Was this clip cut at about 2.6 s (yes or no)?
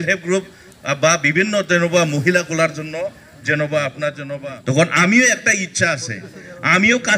no